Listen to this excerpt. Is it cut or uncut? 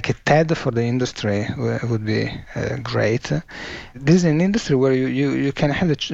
cut